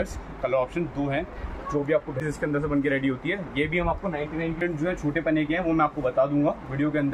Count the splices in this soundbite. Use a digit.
2